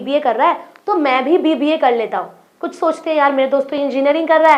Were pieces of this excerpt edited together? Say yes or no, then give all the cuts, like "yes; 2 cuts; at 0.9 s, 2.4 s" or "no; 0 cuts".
no; 0 cuts